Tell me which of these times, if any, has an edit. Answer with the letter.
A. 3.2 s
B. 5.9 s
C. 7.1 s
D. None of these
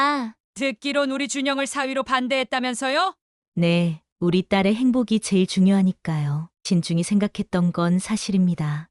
A